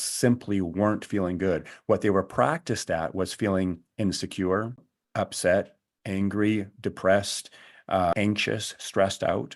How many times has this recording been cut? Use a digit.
2